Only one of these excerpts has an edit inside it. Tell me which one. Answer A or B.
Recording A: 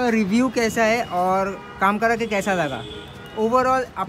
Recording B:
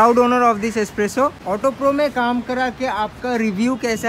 B